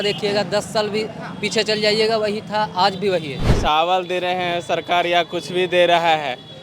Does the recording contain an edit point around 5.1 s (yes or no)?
no